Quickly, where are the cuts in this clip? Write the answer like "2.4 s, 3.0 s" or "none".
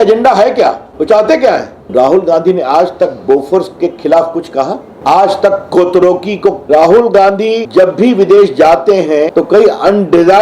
0.9 s, 1.8 s, 4.9 s, 6.6 s, 7.6 s, 9.3 s